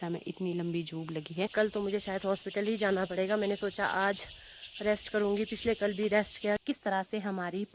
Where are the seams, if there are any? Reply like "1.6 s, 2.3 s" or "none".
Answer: 1.2 s, 6.6 s